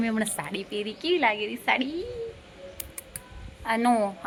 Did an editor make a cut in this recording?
no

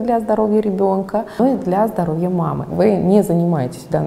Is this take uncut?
no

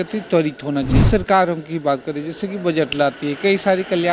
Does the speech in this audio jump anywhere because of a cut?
yes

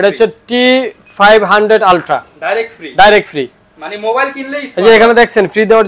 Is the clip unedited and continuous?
yes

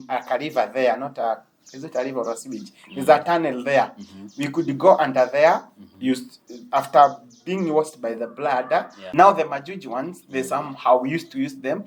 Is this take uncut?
no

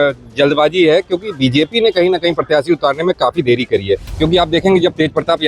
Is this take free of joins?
no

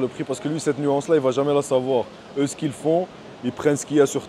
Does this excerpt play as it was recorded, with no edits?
yes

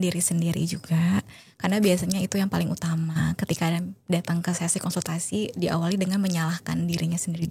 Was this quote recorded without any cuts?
yes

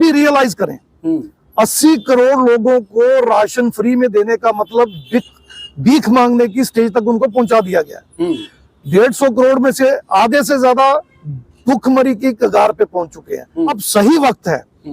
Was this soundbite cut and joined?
yes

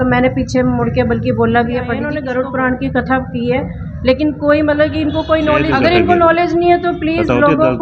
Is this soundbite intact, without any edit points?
no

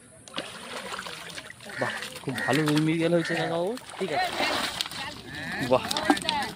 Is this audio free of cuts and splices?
no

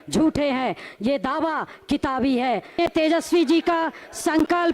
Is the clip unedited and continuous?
no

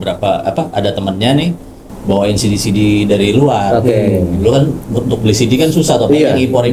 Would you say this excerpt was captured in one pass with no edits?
yes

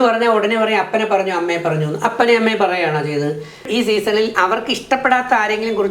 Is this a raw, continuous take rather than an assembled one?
no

